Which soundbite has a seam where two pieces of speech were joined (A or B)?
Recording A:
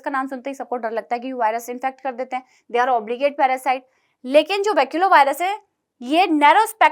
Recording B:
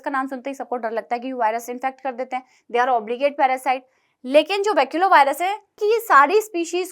B